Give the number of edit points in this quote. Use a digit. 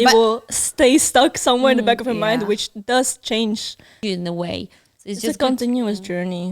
1